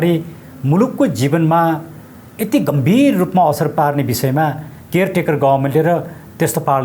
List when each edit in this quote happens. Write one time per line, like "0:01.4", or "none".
none